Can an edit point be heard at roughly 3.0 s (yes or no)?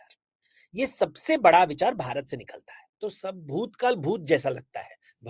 yes